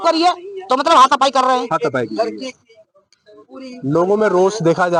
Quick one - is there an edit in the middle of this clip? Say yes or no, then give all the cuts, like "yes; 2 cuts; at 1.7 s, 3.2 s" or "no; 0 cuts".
no; 0 cuts